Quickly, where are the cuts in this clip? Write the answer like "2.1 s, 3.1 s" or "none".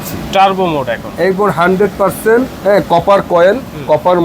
2.5 s